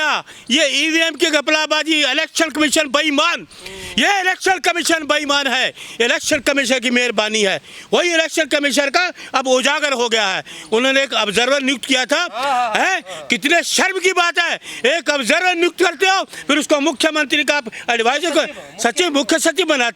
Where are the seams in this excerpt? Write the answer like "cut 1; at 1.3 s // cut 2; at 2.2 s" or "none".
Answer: none